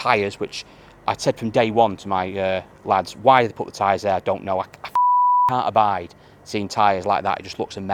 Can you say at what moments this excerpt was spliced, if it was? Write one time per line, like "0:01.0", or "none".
none